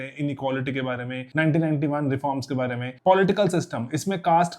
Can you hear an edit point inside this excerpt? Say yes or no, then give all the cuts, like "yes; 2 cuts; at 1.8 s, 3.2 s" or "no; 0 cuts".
yes; 2 cuts; at 1.2 s, 2.9 s